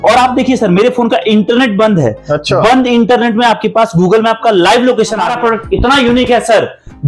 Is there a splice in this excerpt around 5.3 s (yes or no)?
yes